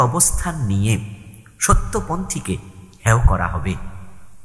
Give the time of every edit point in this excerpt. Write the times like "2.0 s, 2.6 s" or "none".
none